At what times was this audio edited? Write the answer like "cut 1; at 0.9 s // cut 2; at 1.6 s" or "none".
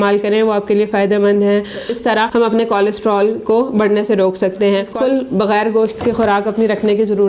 cut 1; at 1.8 s // cut 2; at 4.9 s